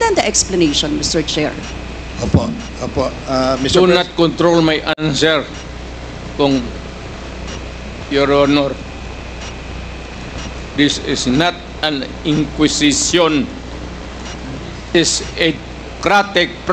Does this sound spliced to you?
no; 0 cuts

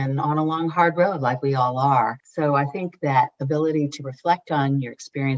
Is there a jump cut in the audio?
yes; 1 cut; at 2.2 s

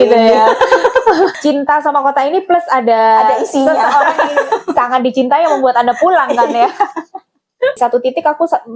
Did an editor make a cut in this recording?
yes; 2 cuts; at 1.4 s, 7.8 s

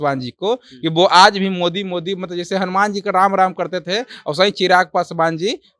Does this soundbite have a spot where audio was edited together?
no; 0 cuts

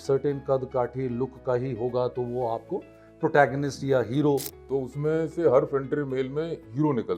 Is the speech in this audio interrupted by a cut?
yes; 1 cut; at 4.5 s

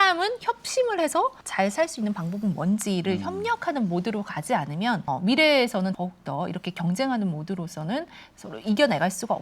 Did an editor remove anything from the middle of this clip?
yes; 3 cuts; at 1.4 s, 5.0 s, 6.0 s

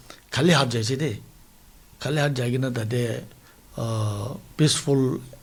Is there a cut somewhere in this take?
no; 0 cuts

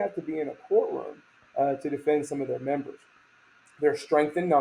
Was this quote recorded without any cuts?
yes; 0 cuts

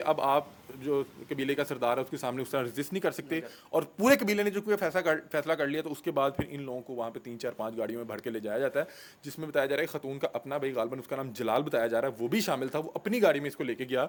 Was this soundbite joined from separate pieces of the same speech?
no; 0 cuts

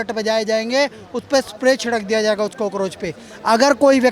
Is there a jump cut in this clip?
no; 0 cuts

